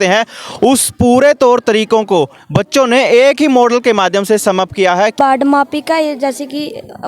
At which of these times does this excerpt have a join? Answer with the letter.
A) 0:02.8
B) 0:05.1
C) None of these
B